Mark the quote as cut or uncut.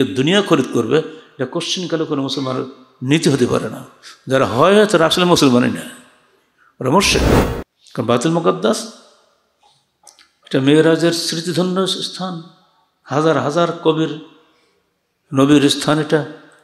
cut